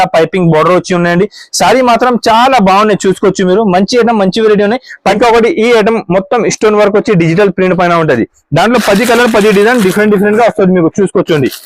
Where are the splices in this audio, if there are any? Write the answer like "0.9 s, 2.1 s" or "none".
5.1 s